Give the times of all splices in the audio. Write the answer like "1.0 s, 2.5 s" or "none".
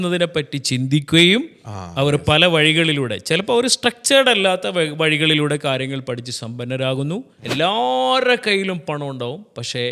7.4 s